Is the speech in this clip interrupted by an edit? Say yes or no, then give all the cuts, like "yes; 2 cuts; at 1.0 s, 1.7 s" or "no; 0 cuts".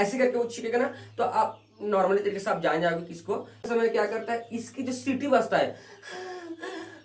yes; 1 cut; at 3.7 s